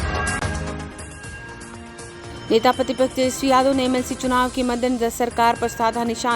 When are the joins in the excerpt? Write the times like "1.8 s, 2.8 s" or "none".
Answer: 2.2 s